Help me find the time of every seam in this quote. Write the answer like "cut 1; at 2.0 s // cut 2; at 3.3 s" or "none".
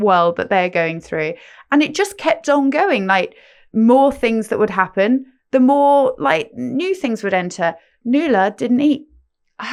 none